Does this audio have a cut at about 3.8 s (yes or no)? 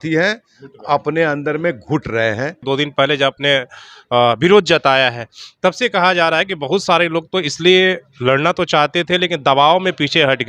no